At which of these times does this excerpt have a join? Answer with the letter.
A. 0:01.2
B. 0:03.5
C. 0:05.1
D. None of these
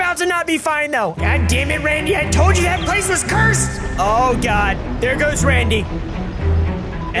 A